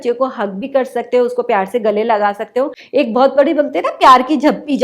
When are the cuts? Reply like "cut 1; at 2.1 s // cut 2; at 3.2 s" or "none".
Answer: cut 1; at 2.8 s

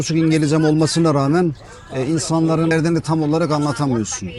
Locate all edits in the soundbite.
cut 1; at 2.7 s

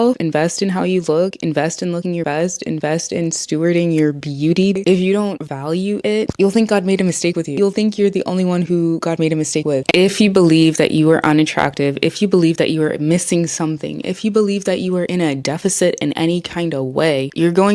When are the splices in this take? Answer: cut 1; at 4.8 s // cut 2; at 7.5 s // cut 3; at 9.9 s

